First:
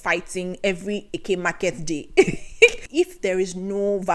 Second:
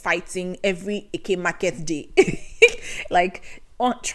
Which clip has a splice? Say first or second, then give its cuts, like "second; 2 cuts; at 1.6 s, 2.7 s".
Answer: first; 1 cut; at 2.8 s